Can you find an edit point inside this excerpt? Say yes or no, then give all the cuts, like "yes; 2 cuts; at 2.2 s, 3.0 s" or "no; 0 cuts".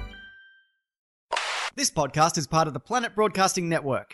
yes; 1 cut; at 1.3 s